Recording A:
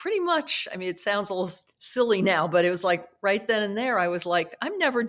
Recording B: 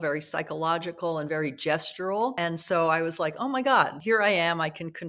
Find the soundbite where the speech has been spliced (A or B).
B